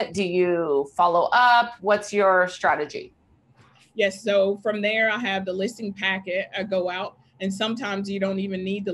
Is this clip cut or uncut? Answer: uncut